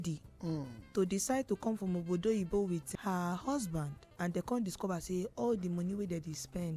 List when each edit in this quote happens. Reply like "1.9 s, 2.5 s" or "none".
2.9 s, 4.0 s